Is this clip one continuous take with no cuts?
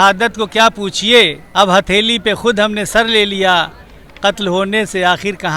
no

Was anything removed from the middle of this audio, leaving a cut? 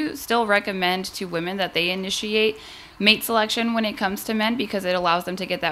no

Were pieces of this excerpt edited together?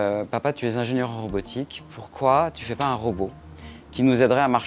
no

